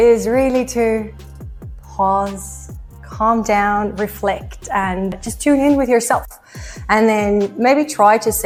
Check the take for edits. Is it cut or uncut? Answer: uncut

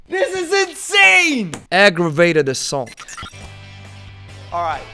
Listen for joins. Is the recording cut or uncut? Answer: cut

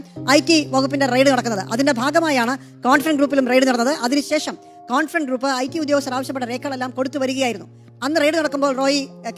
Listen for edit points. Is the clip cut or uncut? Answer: uncut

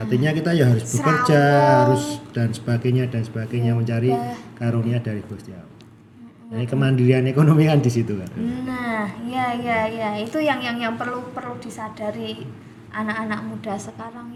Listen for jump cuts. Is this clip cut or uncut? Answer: uncut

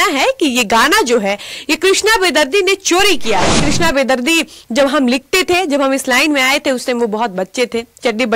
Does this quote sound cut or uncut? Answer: cut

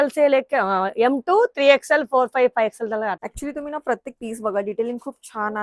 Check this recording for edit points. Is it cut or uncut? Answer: cut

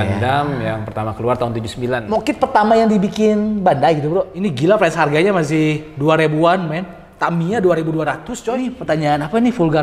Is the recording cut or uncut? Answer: cut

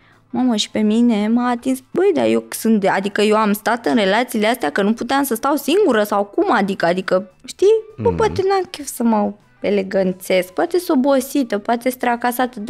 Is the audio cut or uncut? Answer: cut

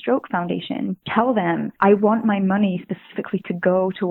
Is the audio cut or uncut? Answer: cut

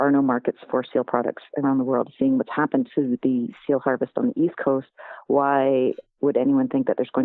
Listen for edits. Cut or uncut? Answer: uncut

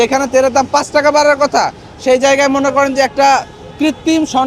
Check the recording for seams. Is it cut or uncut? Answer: uncut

